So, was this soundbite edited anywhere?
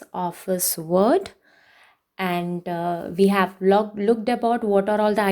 no; 0 cuts

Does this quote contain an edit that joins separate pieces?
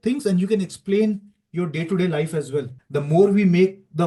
yes; 1 cut; at 2.8 s

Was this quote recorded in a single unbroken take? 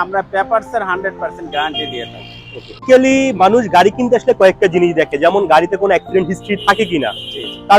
no; 1 cut; at 2.8 s

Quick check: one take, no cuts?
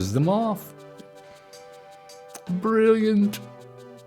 yes; 0 cuts

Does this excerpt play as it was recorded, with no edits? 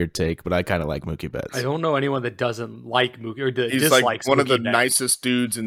yes; 0 cuts

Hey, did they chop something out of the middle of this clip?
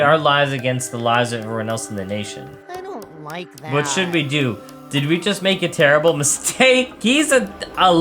yes; 2 cuts; at 2.5 s, 6.9 s

